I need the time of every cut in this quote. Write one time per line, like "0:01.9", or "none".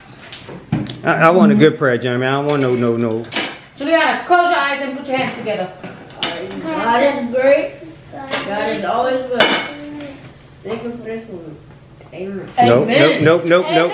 0:05.9